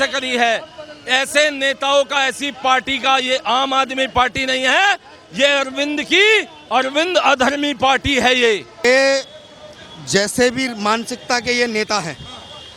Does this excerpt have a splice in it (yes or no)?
yes